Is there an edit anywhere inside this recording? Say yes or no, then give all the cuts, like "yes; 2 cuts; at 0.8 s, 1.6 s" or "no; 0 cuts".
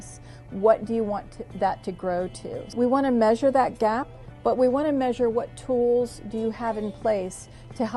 yes; 1 cut; at 2.7 s